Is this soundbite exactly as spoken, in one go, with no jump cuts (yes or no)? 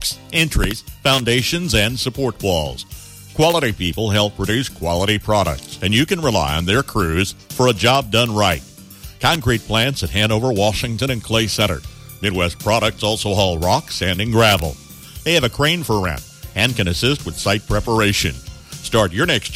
yes